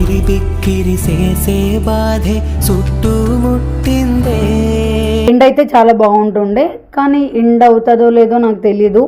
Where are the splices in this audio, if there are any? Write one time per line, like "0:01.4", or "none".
0:05.2